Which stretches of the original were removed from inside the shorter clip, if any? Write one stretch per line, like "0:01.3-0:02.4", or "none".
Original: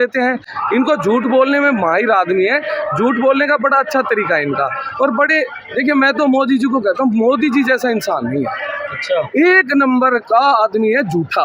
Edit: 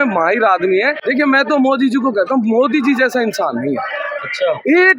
0:02.6-0:05.7